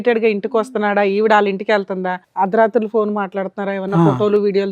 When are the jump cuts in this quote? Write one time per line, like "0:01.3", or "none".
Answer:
0:02.1